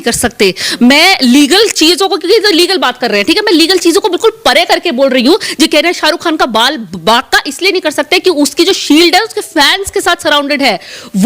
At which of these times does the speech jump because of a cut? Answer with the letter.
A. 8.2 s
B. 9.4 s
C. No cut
C